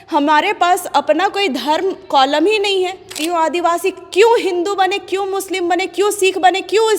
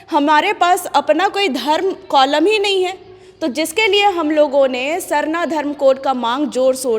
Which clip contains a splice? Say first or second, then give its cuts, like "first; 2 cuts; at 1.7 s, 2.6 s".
first; 1 cut; at 3.2 s